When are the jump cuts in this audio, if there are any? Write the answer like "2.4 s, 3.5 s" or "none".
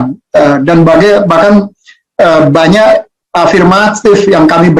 none